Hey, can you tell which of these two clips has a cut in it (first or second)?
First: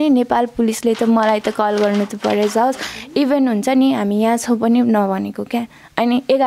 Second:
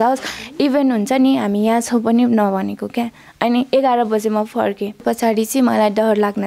second